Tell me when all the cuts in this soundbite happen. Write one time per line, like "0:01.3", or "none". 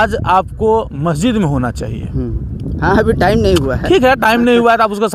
none